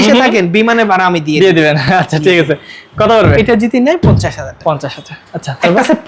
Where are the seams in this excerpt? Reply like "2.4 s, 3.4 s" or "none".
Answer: none